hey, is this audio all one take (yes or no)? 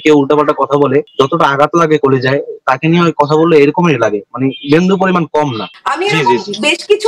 no